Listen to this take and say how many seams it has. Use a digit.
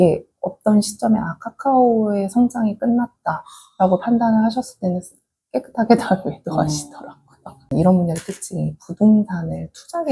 1